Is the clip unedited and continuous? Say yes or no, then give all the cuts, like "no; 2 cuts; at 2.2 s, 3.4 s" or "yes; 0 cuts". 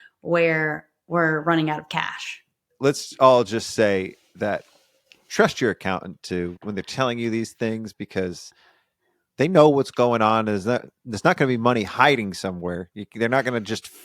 no; 1 cut; at 2.6 s